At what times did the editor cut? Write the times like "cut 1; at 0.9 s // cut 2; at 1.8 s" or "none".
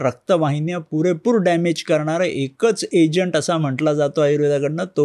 none